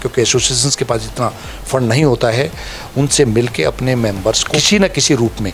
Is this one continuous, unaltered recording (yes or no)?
no